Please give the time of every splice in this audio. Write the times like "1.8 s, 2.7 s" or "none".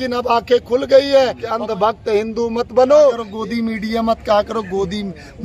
1.4 s, 3.3 s

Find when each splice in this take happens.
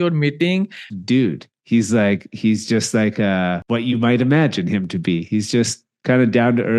0.9 s, 3.6 s

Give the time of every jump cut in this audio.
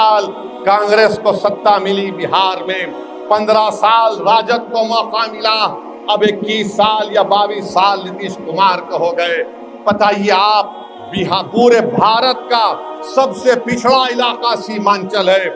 none

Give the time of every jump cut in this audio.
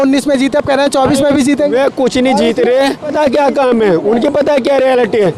3.1 s

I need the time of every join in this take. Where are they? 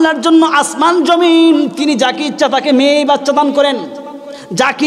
none

